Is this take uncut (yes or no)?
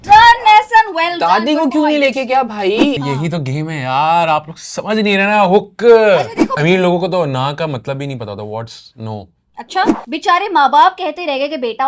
no